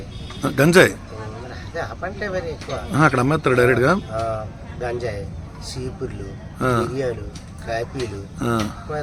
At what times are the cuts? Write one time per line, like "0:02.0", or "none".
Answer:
none